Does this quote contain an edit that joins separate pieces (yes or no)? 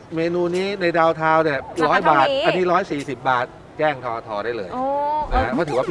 no